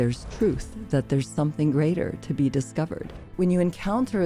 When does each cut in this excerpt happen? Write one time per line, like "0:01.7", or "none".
0:03.2